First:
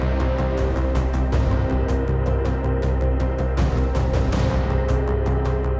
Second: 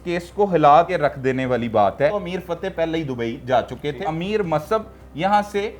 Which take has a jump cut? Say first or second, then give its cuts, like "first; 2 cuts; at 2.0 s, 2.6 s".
second; 3 cuts; at 0.9 s, 2.1 s, 4.1 s